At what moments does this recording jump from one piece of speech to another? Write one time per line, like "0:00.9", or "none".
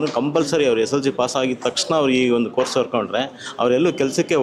none

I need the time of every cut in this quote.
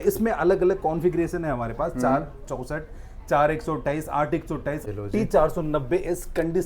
0:04.8

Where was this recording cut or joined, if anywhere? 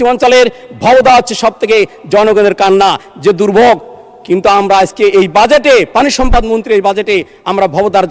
none

